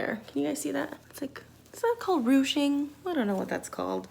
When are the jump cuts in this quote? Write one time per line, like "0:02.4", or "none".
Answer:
0:01.0